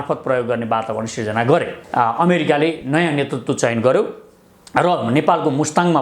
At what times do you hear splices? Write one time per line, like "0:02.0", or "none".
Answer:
0:01.8